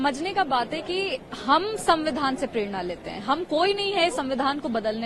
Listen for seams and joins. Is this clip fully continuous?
yes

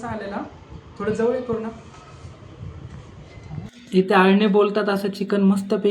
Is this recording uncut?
no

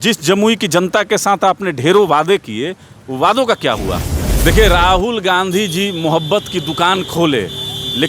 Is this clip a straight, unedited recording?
no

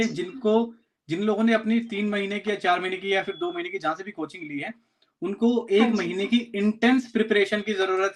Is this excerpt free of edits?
yes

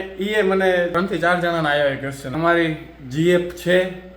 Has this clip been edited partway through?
yes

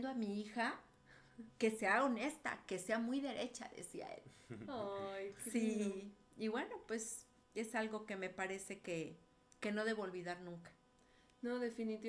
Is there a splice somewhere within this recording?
no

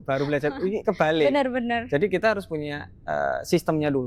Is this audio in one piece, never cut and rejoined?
yes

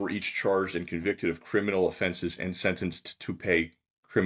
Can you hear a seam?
no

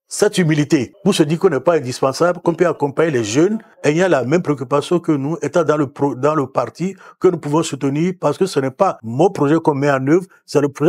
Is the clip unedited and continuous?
no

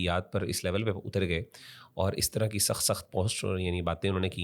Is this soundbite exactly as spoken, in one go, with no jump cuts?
yes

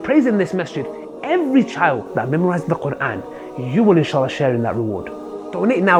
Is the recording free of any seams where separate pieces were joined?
yes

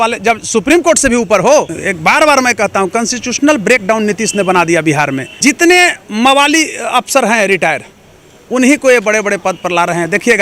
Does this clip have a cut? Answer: yes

